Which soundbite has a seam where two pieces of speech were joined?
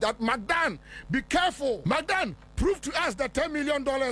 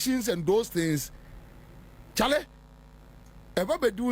first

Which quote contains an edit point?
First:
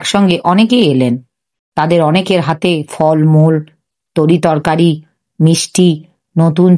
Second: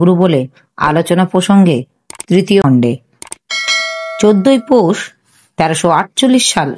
second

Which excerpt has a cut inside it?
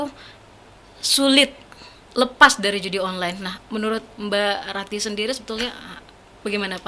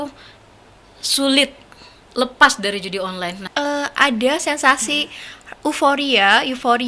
second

